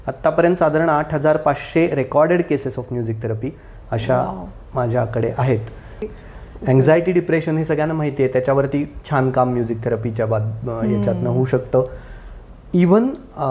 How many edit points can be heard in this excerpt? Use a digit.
1